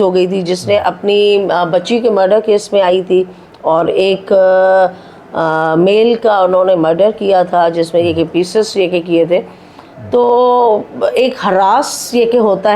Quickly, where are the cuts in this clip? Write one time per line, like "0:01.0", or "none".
none